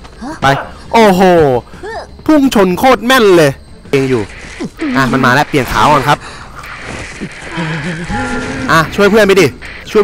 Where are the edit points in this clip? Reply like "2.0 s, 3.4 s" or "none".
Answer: 3.9 s